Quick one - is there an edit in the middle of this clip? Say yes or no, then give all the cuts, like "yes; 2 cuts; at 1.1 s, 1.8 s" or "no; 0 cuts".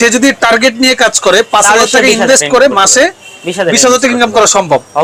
no; 0 cuts